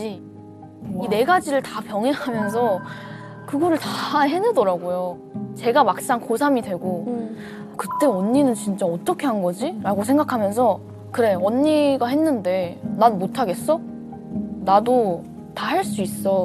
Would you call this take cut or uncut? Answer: uncut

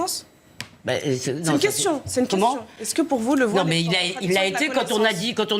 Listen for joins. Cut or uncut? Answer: uncut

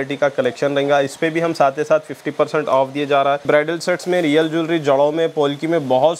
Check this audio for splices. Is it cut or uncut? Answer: cut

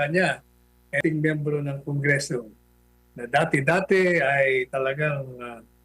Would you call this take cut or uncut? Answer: cut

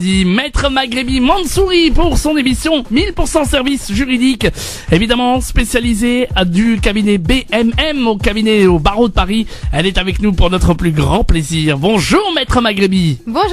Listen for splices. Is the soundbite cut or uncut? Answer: uncut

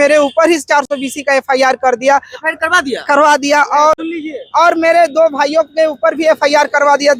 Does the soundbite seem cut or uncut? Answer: uncut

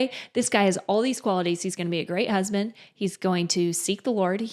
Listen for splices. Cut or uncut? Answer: uncut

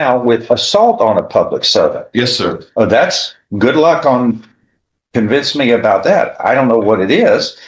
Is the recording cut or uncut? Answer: uncut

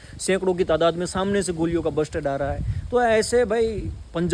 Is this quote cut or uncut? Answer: uncut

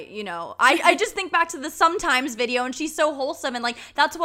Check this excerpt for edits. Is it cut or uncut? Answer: uncut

